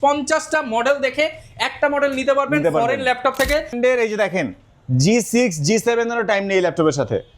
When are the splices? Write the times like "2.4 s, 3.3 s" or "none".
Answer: 3.7 s